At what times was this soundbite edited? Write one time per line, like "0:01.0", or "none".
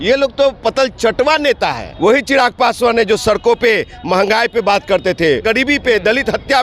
0:01.8
0:05.4